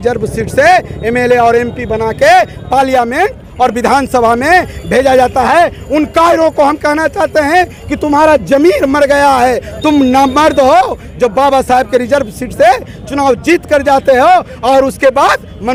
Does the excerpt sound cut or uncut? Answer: uncut